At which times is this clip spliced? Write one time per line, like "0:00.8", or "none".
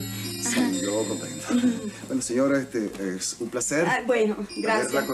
0:01.3